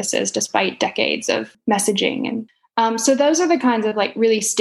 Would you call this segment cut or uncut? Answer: cut